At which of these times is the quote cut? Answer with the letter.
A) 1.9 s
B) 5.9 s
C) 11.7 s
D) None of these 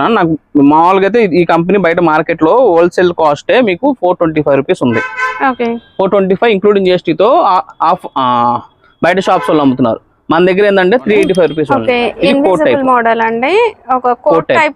C